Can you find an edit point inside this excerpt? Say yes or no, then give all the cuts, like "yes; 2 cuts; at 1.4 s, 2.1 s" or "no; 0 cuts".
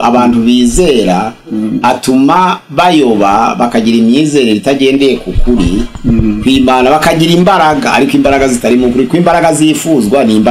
no; 0 cuts